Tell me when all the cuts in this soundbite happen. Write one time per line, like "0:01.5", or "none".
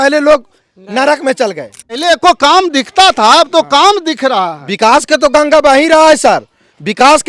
0:02.0